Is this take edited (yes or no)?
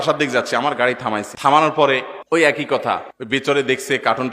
yes